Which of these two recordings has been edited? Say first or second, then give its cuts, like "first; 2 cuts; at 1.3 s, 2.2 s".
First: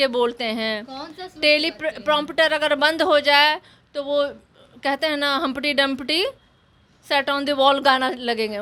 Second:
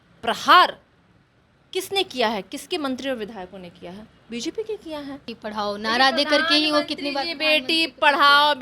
second; 1 cut; at 5.4 s